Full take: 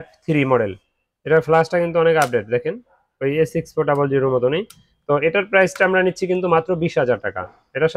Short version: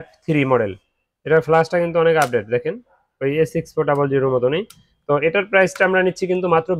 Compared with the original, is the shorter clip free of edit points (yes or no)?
yes